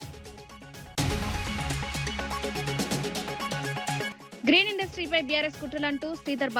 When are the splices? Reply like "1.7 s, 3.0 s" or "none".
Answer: 0.9 s, 2.5 s, 4.2 s